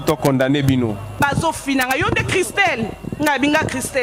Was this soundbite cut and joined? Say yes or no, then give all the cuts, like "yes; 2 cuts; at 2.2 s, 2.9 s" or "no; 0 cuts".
yes; 1 cut; at 1.1 s